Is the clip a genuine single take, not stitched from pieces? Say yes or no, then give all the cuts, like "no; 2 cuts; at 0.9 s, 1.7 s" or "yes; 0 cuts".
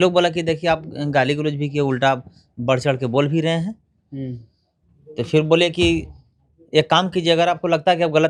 yes; 0 cuts